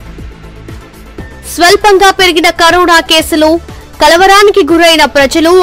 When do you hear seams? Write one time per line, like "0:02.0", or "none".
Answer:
none